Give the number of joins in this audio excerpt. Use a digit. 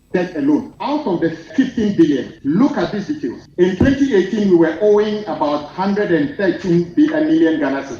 3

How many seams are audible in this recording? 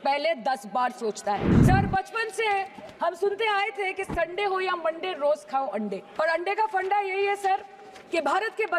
2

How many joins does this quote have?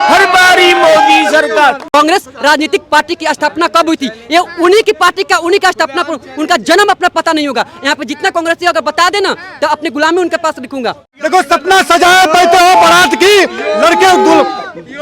2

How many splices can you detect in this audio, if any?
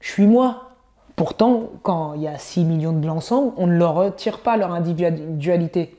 1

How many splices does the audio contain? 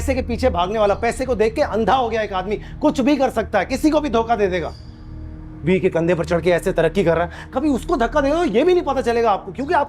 0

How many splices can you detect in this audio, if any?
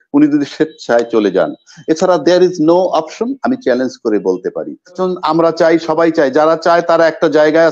1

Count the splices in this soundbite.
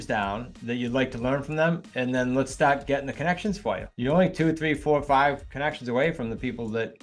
2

